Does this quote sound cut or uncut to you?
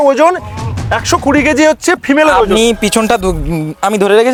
uncut